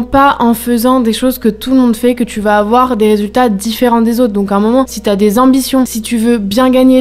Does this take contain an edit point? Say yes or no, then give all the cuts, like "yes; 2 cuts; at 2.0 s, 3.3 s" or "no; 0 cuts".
no; 0 cuts